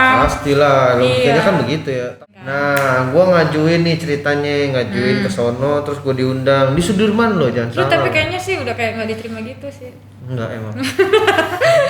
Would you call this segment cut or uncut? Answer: cut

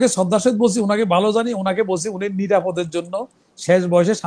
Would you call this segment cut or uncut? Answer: uncut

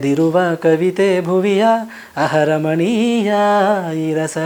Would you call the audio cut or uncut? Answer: uncut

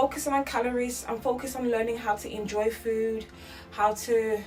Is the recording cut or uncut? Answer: uncut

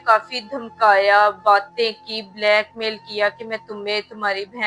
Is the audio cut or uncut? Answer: uncut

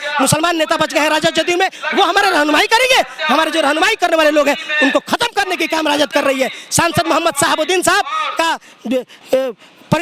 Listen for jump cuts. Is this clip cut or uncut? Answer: uncut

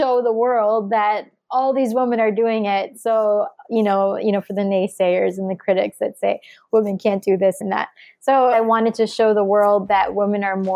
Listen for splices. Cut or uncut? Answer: cut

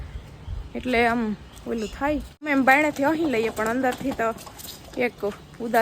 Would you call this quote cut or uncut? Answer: cut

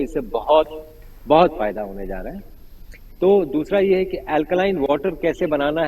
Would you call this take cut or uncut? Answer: uncut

